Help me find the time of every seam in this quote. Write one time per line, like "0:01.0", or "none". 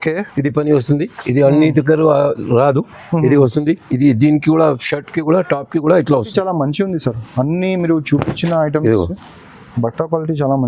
0:06.3